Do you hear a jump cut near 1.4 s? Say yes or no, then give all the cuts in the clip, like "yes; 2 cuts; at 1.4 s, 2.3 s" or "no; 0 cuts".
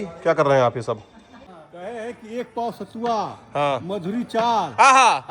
yes; 1 cut; at 1.4 s